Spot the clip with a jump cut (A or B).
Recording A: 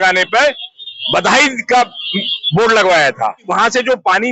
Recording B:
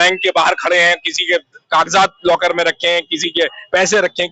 A